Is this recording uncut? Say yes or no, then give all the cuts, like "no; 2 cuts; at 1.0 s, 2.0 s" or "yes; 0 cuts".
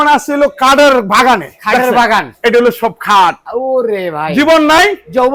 yes; 0 cuts